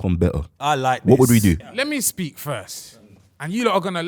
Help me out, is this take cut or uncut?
cut